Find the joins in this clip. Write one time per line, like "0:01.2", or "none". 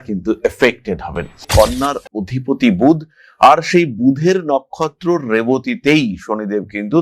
0:01.5

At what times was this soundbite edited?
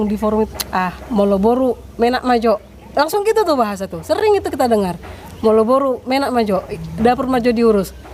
none

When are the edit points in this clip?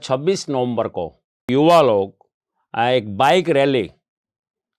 0:01.5

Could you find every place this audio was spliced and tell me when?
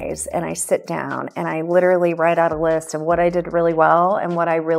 none

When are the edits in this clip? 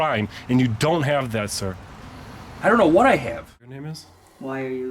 0:03.8

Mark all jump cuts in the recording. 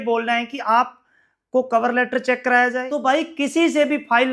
0:02.9

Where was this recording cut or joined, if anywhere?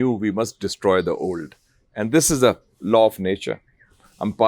none

